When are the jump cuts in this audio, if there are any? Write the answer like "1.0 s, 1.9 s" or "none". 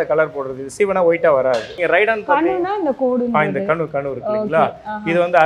1.7 s